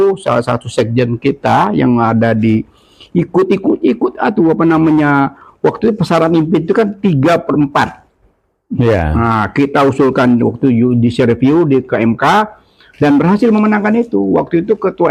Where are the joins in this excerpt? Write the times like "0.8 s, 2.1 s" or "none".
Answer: none